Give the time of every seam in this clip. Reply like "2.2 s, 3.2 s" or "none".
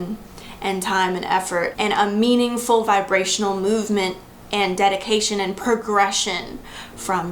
1.7 s